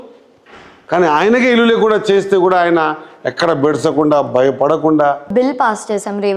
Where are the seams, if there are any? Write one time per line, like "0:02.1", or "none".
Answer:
0:05.3